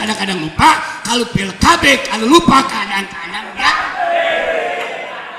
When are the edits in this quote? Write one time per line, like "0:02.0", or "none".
none